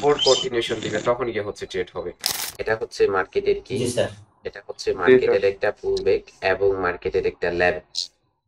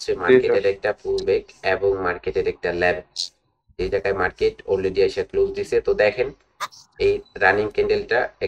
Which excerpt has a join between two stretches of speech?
first; 1 cut; at 2.4 s

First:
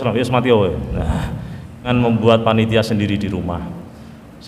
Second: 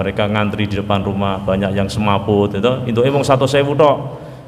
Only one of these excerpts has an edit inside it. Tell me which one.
first; 1 cut; at 1.9 s

